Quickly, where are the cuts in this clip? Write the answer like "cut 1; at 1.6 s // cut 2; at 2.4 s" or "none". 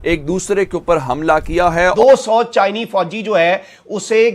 cut 1; at 1.7 s